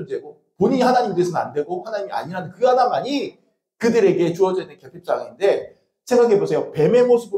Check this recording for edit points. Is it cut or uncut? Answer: uncut